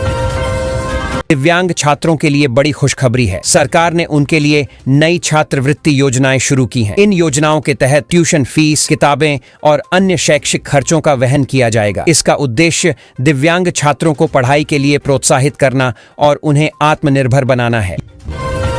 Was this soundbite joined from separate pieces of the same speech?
yes; 1 cut; at 1.1 s

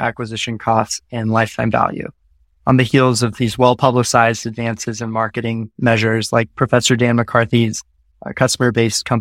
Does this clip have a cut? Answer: no; 0 cuts

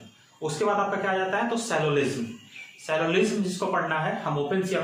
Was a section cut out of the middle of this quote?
no; 0 cuts

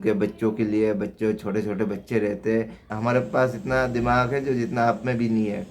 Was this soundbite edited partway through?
yes; 1 cut; at 3.0 s

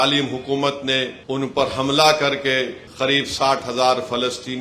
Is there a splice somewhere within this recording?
yes; 2 cuts; at 1.2 s, 2.8 s

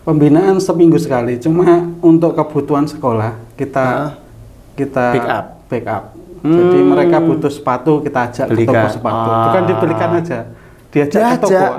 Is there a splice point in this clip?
no; 0 cuts

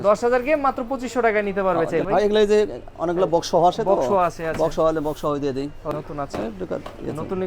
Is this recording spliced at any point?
yes; 2 cuts; at 2.1 s, 5.9 s

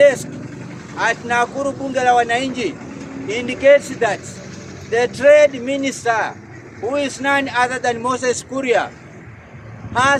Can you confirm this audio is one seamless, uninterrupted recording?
yes; 0 cuts

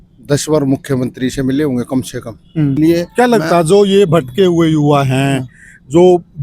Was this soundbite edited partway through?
yes; 1 cut; at 2.8 s

